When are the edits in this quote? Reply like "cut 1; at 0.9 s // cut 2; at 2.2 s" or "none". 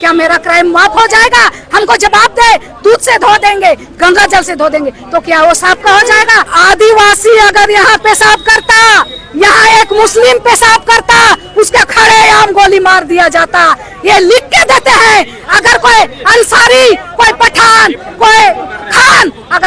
cut 1; at 6.5 s